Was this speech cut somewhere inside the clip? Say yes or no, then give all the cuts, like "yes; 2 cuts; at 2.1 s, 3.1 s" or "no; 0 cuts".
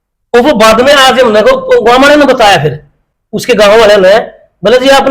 no; 0 cuts